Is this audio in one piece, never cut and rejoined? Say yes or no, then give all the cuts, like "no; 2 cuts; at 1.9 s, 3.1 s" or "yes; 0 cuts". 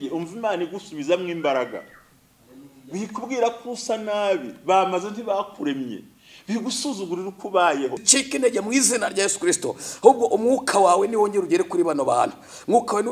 no; 1 cut; at 8.0 s